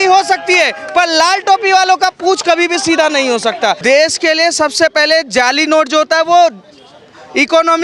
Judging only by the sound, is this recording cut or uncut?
cut